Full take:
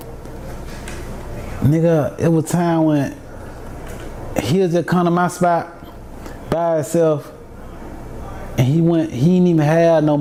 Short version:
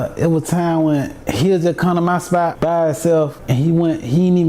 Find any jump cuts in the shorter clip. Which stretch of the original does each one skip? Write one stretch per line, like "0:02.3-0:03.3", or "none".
0:03.2-0:04.3
0:05.6-0:06.4
0:07.3-0:08.5